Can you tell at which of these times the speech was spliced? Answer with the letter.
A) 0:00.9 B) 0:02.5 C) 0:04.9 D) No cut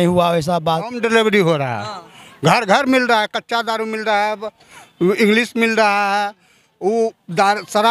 A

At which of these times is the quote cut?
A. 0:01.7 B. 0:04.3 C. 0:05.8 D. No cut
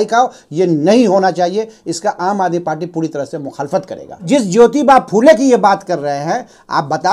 B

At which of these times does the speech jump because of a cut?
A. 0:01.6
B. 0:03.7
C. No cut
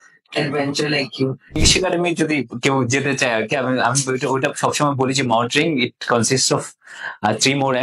A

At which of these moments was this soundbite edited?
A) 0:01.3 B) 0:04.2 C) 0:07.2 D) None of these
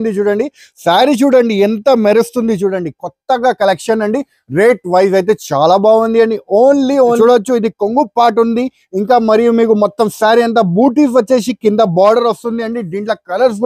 C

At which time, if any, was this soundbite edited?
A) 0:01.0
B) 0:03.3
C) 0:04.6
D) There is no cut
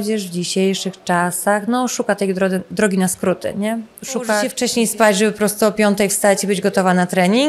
C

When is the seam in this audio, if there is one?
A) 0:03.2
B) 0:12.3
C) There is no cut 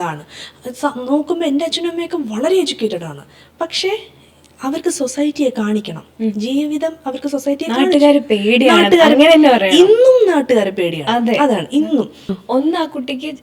B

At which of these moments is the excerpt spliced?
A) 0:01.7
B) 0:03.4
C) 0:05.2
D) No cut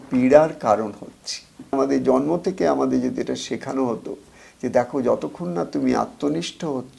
A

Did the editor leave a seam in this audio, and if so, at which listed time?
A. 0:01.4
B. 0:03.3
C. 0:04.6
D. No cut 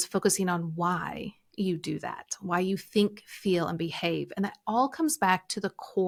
D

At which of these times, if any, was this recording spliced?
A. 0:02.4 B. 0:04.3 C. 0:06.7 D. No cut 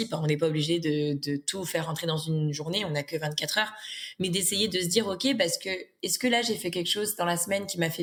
D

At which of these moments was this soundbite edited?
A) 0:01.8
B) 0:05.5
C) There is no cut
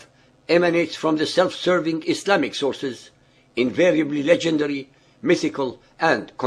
B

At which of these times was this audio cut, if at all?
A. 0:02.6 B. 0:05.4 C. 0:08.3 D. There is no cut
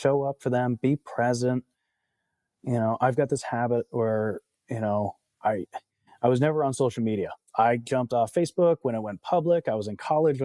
D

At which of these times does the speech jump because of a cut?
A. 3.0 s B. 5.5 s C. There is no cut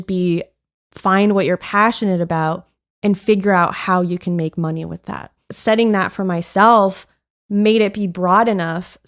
B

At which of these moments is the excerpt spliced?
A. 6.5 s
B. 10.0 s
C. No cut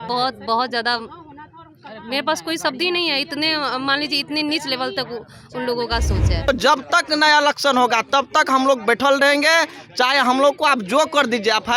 A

